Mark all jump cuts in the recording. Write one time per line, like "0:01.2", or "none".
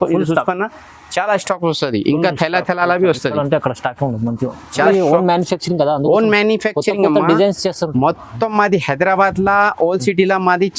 0:04.8